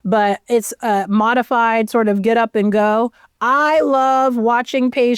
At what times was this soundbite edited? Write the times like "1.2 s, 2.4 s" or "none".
none